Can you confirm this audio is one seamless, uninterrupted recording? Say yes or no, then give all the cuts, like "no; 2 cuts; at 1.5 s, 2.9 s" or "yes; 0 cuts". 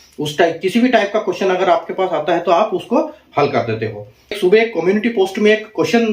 no; 1 cut; at 4.4 s